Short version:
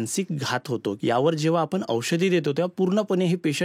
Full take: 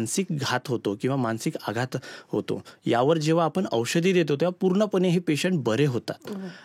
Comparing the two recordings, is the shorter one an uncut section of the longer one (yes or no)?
no